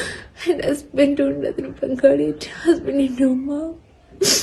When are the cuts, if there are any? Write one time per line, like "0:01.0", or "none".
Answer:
none